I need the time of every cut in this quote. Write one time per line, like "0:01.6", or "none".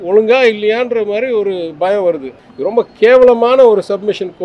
0:02.3